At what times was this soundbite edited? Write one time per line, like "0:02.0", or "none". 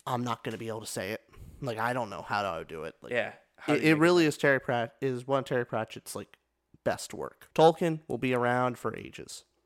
0:07.4